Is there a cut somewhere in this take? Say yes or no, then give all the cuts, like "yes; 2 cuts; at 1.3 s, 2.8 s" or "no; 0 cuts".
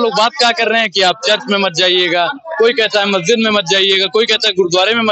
no; 0 cuts